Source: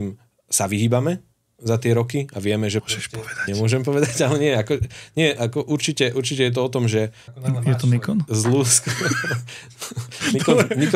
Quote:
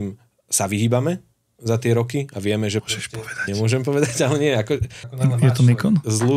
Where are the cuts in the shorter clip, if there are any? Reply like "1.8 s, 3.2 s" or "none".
5.0 s